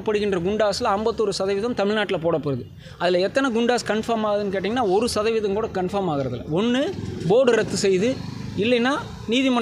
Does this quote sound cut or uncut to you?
uncut